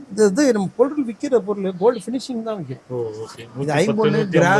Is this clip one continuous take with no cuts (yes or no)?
yes